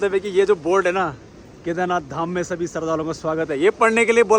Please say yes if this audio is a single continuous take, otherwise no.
yes